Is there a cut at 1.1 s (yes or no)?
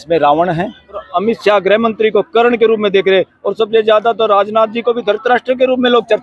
yes